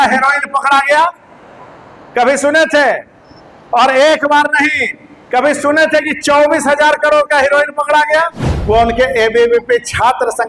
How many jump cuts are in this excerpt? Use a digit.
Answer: 1